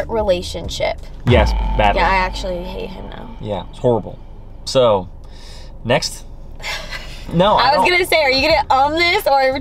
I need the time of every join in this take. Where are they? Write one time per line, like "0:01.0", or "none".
none